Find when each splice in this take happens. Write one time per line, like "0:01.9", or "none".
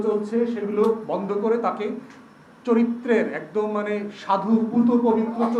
none